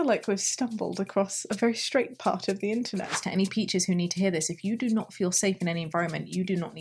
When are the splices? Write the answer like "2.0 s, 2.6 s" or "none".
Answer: 3.1 s